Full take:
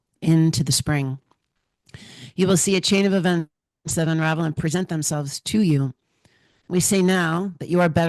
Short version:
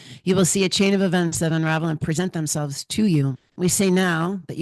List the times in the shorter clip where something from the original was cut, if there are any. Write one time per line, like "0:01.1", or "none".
0:01.3
0:03.4